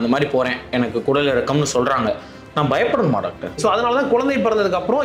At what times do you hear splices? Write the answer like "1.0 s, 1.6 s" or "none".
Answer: 3.6 s